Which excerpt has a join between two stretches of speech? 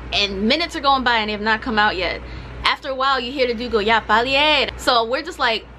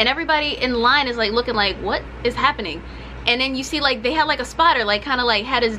first; 1 cut; at 4.7 s

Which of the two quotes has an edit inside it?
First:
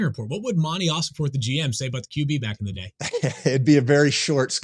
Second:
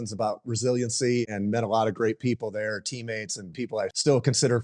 second; 2 cuts; at 1.2 s, 3.6 s

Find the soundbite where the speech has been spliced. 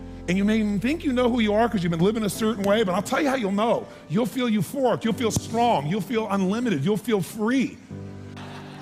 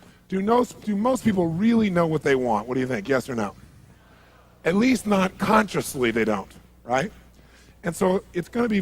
second; 1 cut; at 1.2 s

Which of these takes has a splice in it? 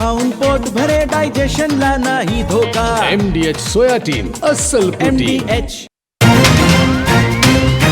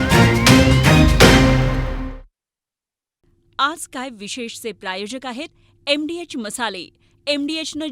first; 1 cut; at 6.1 s

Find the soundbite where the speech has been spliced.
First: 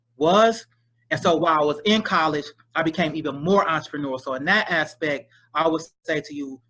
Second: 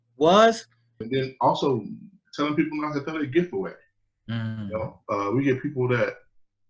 second; 1 cut; at 1.0 s

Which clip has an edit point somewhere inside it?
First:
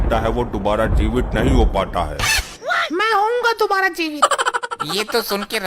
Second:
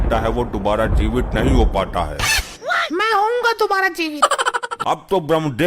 second; 1 cut; at 4.7 s

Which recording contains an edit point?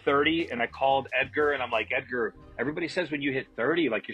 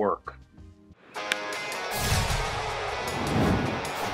second; 1 cut; at 0.9 s

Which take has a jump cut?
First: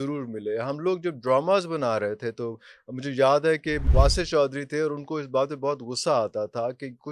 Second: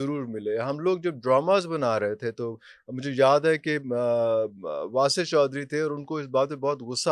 first; 1 cut; at 3.8 s

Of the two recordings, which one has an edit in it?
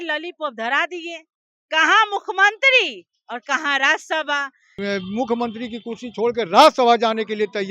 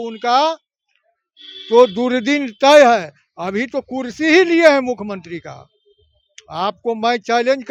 first; 1 cut; at 4.8 s

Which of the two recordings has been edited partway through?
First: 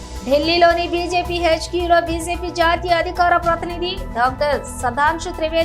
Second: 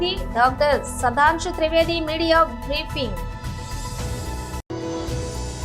second; 2 cuts; at 3.1 s, 4.6 s

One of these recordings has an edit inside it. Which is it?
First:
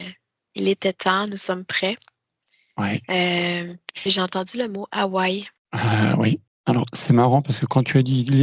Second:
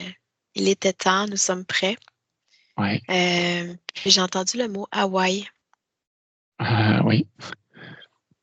first; 2 cuts; at 5.6 s, 6.5 s

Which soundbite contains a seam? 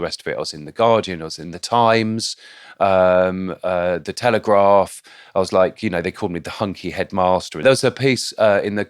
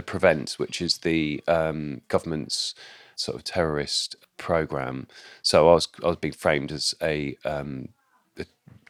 first; 1 cut; at 7.6 s

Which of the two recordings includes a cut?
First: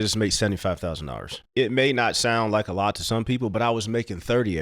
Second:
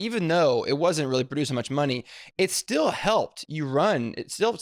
first; 1 cut; at 1.4 s

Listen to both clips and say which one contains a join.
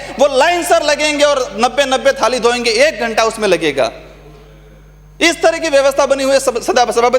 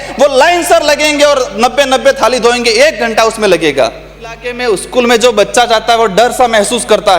second; 1 cut; at 4.5 s

